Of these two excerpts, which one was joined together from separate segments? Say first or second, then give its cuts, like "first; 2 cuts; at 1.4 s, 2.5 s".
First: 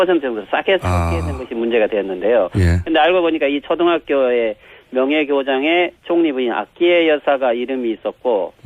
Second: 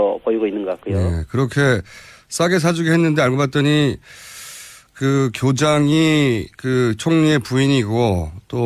second; 1 cut; at 4.2 s